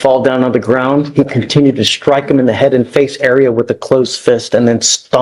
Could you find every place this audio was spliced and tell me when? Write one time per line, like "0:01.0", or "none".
none